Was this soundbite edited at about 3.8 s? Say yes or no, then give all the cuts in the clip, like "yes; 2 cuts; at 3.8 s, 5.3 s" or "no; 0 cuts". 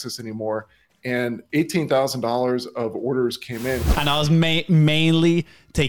yes; 1 cut; at 3.8 s